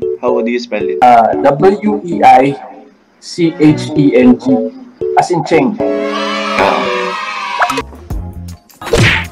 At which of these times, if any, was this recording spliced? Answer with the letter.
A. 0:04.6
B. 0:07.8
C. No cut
B